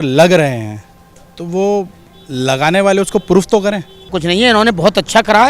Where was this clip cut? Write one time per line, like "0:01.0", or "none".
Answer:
0:04.2